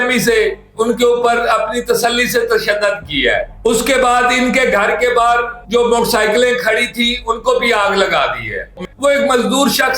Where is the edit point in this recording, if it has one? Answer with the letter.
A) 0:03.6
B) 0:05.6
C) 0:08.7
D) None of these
C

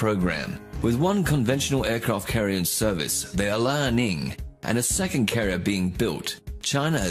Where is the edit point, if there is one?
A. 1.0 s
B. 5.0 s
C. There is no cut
B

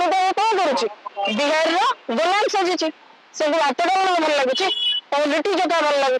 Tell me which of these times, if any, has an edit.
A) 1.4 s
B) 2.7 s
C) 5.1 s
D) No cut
D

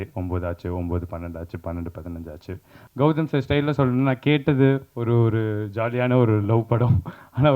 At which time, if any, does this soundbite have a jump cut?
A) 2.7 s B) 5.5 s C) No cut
A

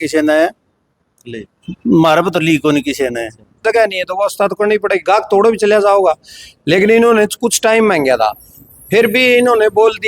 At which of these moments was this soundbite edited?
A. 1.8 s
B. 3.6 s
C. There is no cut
B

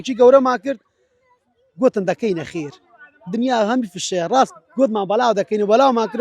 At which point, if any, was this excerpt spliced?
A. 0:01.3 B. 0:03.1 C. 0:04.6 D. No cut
D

